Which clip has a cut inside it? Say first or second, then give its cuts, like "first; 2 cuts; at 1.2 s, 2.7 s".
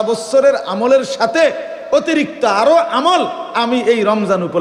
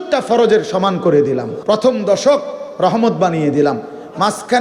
second; 1 cut; at 1.5 s